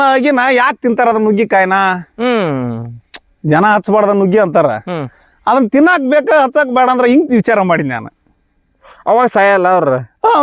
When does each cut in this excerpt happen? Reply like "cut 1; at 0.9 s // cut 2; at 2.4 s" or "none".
none